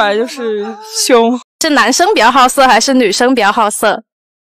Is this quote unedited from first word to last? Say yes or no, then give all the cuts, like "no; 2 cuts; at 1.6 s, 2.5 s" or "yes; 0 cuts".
no; 1 cut; at 1.5 s